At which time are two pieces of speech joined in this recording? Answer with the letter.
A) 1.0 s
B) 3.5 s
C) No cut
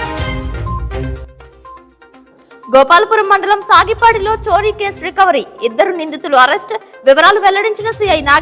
A